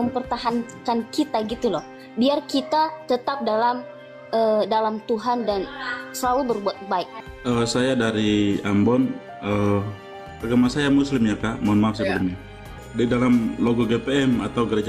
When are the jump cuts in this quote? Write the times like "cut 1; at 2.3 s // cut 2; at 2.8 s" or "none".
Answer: cut 1; at 7.1 s // cut 2; at 10.3 s // cut 3; at 12.8 s